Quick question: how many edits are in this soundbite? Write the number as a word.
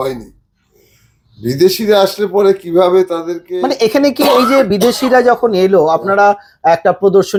zero